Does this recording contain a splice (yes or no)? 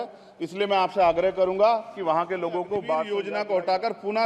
yes